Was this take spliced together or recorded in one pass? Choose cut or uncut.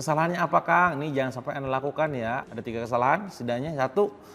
uncut